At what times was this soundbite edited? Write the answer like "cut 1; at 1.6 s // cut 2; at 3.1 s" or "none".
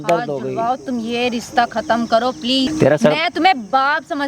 cut 1; at 2.7 s